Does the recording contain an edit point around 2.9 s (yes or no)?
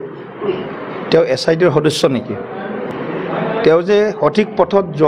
yes